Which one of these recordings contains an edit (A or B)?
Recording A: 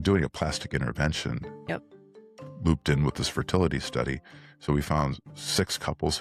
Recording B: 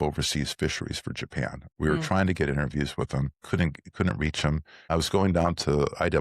B